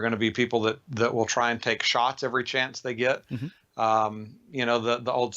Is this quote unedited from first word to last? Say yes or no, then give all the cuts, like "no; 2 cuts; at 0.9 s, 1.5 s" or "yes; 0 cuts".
yes; 0 cuts